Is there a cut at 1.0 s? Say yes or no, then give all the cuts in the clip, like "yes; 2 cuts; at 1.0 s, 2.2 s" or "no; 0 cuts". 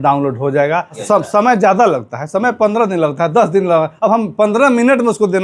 yes; 1 cut; at 1.0 s